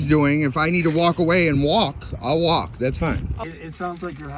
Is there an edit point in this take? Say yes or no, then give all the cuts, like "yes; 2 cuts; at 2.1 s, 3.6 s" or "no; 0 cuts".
yes; 1 cut; at 3.4 s